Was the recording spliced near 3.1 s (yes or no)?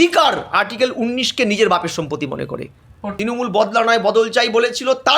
yes